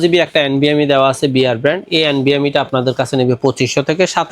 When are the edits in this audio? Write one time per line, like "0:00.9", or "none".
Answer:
none